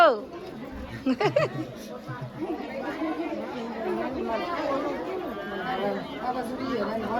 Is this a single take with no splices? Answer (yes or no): yes